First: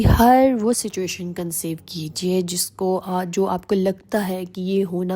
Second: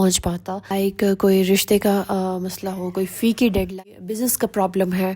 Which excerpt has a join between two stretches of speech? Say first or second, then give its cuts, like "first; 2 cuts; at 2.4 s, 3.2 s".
second; 1 cut; at 3.7 s